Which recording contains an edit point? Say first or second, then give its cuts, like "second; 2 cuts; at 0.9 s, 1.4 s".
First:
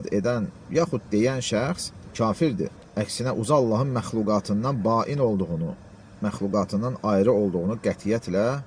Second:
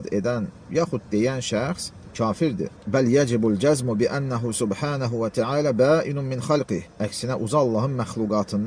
first; 1 cut; at 2.8 s